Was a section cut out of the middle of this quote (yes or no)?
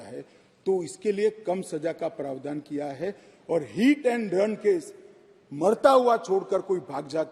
no